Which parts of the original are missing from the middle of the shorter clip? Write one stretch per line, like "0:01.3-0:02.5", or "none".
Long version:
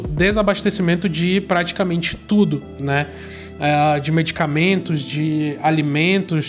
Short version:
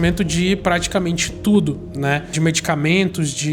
0:03.2-0:04.0